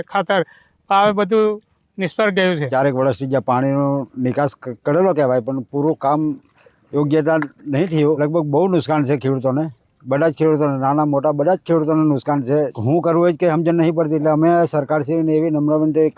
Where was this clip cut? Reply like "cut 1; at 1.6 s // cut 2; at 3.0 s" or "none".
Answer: cut 1; at 2.6 s // cut 2; at 8.2 s // cut 3; at 12.8 s